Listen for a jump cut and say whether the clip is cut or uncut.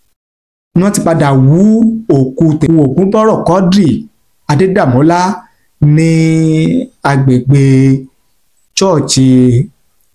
cut